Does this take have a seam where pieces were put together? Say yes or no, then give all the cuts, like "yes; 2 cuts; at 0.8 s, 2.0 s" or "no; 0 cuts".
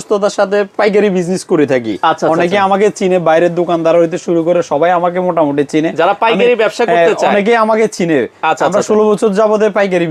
no; 0 cuts